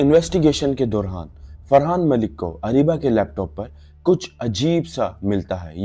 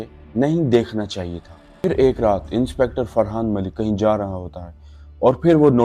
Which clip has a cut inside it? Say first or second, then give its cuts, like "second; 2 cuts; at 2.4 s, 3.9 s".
second; 1 cut; at 1.6 s